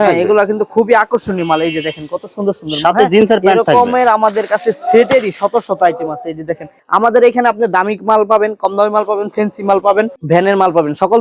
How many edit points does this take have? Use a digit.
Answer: 1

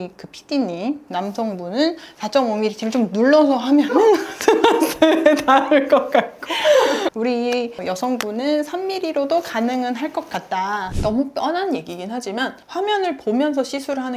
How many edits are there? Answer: 2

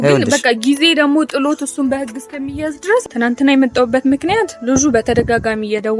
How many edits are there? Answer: 1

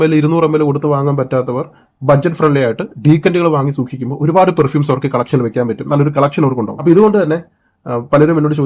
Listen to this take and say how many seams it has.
1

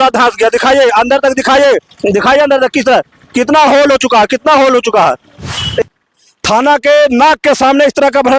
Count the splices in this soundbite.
1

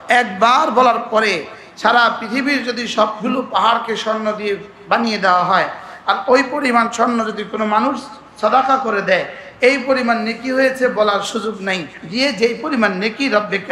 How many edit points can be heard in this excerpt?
1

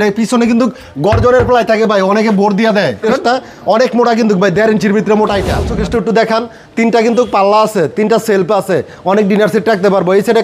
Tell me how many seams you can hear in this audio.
2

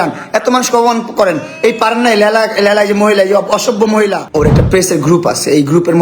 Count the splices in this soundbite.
1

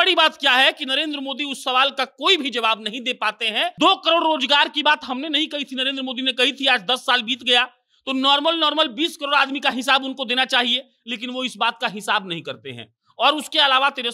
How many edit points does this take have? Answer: 1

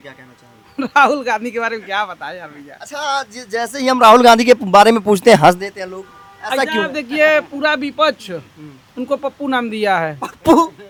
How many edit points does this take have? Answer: 0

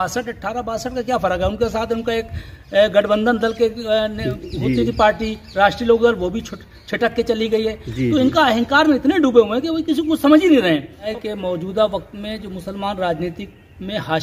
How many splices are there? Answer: 1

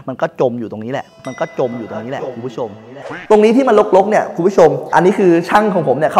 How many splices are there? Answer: 2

